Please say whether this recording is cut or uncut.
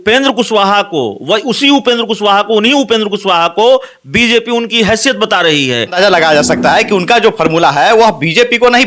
cut